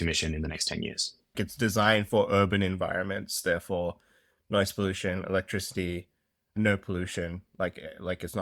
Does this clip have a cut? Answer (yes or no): yes